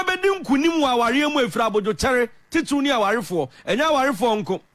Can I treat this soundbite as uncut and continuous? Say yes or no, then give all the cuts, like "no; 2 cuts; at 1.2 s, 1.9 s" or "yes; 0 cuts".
yes; 0 cuts